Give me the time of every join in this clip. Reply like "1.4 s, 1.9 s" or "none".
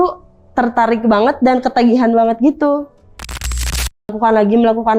3.5 s